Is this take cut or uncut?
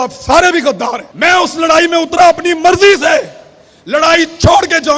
cut